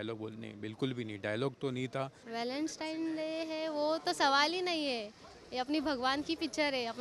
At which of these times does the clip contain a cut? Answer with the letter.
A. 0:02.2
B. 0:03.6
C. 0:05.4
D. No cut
A